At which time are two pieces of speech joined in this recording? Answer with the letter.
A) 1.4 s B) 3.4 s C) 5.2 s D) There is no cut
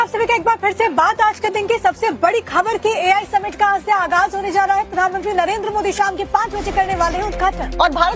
A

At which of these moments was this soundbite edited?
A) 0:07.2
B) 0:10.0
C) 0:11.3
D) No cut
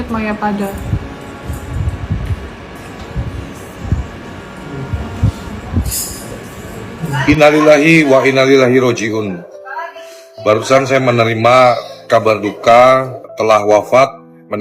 A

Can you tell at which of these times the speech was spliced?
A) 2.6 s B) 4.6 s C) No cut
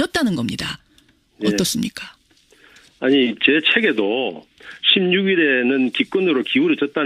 C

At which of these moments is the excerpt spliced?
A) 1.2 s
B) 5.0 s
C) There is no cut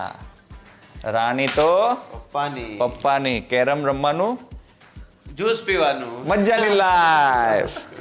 C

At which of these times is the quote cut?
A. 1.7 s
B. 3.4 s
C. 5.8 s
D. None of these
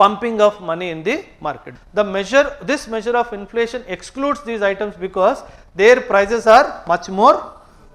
A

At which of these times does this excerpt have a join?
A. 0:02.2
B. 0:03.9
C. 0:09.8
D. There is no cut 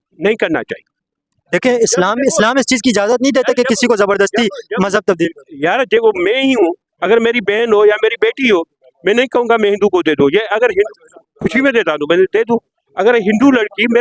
D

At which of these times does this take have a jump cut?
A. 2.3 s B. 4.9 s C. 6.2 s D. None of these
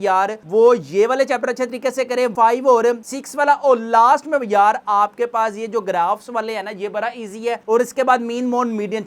A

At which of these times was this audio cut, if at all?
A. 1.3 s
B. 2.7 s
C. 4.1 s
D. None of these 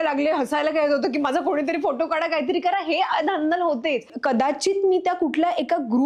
C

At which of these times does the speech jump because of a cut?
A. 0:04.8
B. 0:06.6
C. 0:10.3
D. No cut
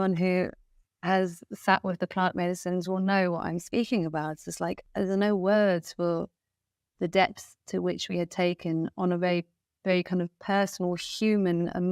A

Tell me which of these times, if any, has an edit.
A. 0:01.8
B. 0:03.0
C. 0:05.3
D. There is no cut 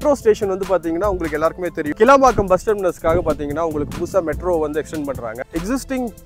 C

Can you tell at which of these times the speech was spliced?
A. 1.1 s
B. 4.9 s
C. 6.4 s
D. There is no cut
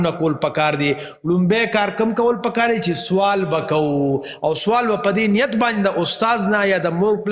D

